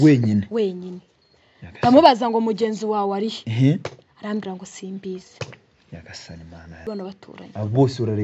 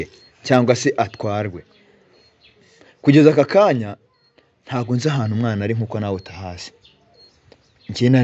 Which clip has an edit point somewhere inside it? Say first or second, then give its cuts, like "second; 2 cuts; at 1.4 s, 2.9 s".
first; 1 cut; at 6.9 s